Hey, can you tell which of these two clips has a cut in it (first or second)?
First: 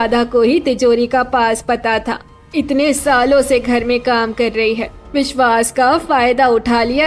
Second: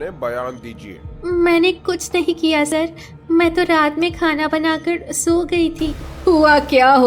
second